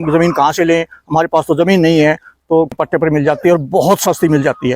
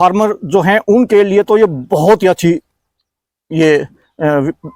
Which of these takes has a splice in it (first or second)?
first